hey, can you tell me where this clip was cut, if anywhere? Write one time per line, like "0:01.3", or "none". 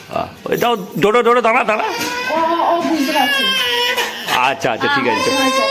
none